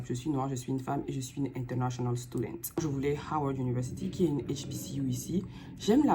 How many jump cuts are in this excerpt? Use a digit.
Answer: 1